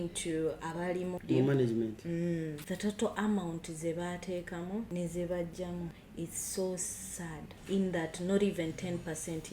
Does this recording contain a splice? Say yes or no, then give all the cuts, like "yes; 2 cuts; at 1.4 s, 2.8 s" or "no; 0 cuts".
yes; 5 cuts; at 1.2 s, 2.6 s, 4.9 s, 6.0 s, 7.5 s